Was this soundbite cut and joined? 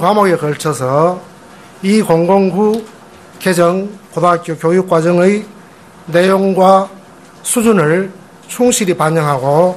yes; 1 cut; at 6.3 s

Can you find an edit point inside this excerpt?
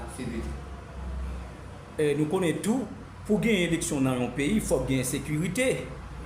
no; 0 cuts

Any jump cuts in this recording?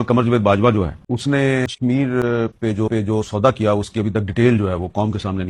yes; 2 cuts; at 1.0 s, 1.7 s

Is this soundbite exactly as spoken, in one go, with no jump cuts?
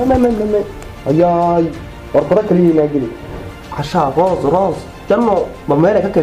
yes; 0 cuts

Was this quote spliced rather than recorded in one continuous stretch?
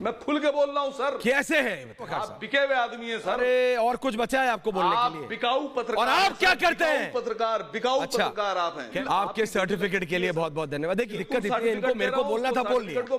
yes; 3 cuts; at 2.1 s, 9.0 s, 11.2 s

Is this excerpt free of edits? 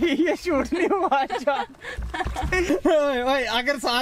no; 1 cut; at 2.7 s

